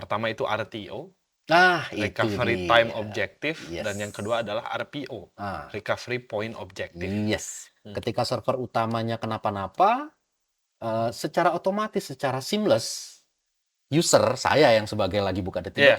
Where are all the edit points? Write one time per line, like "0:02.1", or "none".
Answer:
0:07.6